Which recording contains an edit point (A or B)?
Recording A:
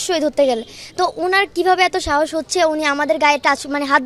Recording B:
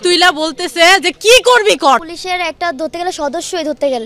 B